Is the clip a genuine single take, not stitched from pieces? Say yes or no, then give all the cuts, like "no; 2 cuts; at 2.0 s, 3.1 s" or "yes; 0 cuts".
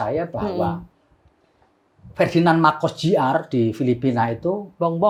yes; 0 cuts